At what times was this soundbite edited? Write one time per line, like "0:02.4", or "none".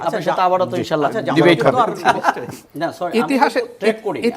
0:02.6